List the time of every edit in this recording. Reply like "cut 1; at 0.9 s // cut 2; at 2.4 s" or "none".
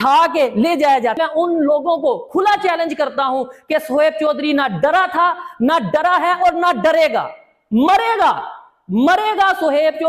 cut 1; at 1.2 s